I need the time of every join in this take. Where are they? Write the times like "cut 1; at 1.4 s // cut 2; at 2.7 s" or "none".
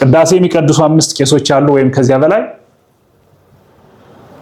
none